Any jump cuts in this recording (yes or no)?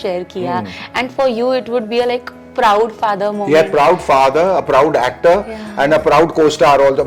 no